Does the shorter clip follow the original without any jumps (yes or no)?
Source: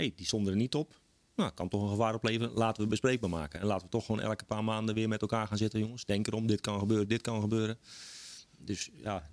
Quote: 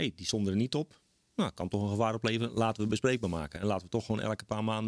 yes